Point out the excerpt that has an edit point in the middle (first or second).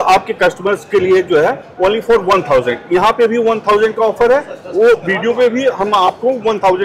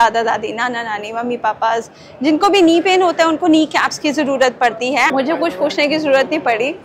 second